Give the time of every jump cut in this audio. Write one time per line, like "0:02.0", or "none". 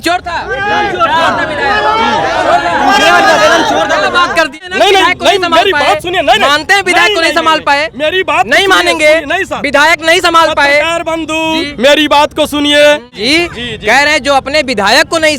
0:04.6
0:13.2